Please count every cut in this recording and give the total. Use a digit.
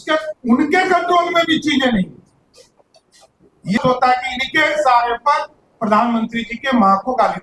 1